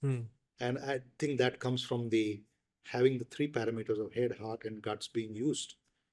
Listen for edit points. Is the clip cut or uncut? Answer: uncut